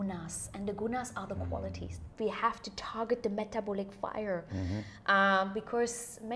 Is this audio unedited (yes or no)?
no